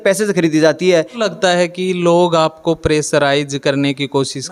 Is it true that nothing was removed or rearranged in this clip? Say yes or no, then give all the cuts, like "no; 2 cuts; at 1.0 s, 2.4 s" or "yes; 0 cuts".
no; 1 cut; at 1.2 s